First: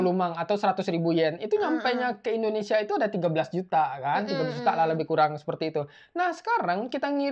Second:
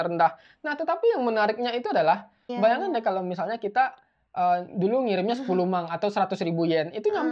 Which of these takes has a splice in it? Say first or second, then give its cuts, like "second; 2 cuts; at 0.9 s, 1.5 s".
second; 1 cut; at 2.5 s